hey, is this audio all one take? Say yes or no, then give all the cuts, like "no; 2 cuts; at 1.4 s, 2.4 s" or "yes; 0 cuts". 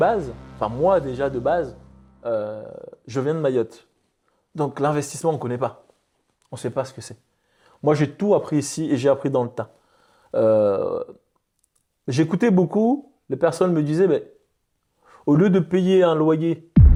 yes; 0 cuts